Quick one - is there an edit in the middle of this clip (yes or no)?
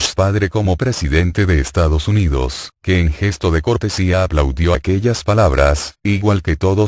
no